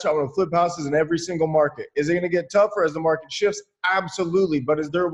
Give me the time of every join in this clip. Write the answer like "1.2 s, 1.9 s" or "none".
none